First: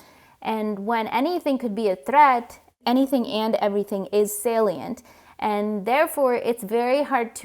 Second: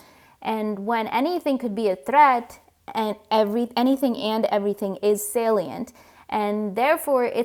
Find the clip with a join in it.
first; 1 cut; at 2.8 s

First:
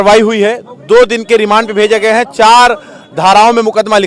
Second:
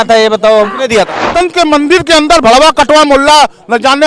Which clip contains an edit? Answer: second; 1 cut; at 1.3 s

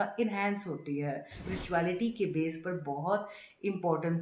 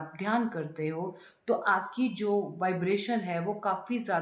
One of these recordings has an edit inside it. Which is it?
first; 1 cut; at 1.4 s

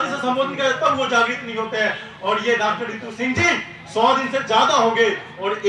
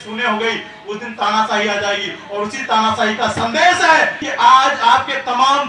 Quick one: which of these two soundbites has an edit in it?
second; 1 cut; at 4.2 s

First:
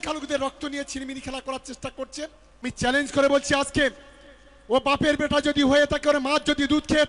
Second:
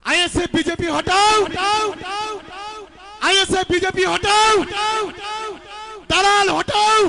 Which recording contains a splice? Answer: first; 1 cut; at 2.6 s

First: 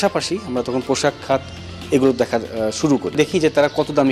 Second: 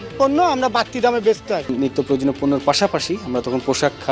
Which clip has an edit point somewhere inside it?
second; 1 cut; at 1.7 s

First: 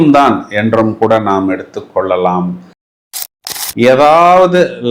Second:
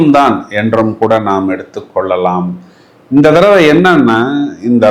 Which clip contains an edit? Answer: first; 1 cut; at 3.1 s

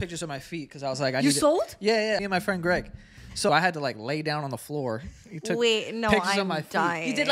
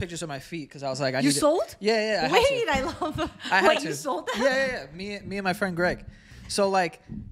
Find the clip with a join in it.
first; 2 cuts; at 2.2 s, 3.5 s

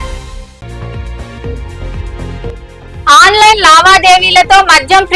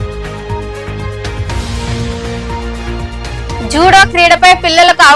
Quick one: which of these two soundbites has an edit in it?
second; 1 cut; at 1.2 s

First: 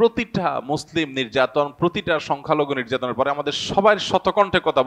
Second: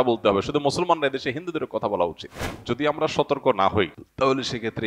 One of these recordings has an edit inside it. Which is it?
second; 1 cut; at 2.5 s

